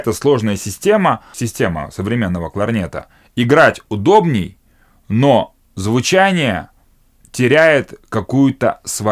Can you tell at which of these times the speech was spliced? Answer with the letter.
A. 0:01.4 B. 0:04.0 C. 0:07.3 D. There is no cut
A